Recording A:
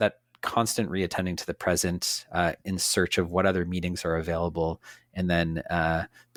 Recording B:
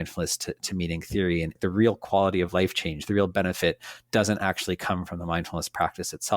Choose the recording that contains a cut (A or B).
B